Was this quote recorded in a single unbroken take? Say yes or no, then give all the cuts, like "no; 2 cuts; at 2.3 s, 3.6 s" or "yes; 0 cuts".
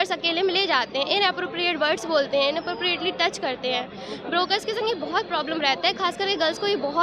yes; 0 cuts